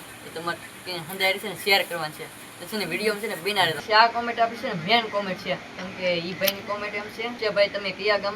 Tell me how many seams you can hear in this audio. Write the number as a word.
two